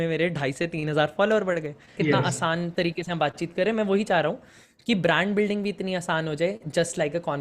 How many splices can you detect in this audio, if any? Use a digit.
1